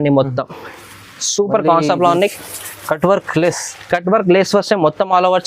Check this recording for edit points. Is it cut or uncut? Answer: uncut